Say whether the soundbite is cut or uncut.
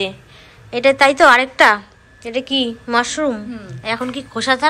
uncut